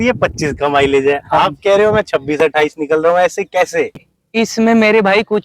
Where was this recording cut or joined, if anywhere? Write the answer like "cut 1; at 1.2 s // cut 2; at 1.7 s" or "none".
cut 1; at 3.9 s